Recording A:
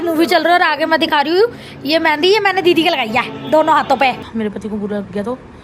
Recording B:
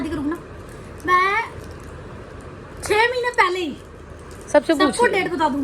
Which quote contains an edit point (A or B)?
A